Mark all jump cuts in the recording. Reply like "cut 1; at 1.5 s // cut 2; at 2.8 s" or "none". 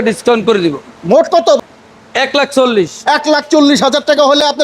cut 1; at 1.5 s